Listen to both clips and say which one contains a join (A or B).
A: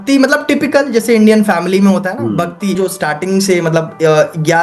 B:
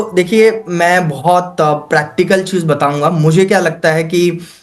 A